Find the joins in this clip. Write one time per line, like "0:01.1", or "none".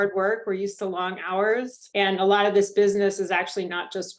0:01.8